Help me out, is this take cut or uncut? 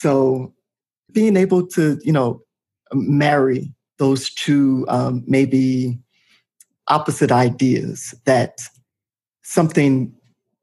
cut